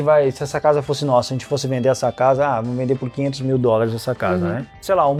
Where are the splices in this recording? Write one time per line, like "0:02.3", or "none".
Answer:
none